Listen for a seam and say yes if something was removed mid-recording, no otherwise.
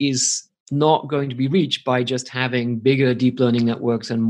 no